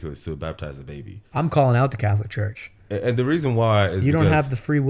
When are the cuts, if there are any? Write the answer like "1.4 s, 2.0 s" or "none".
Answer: 1.2 s